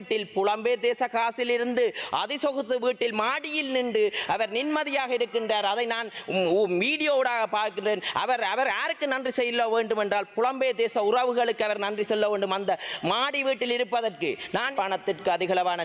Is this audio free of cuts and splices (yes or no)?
no